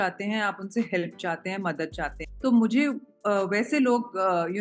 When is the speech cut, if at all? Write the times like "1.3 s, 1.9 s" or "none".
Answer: 2.2 s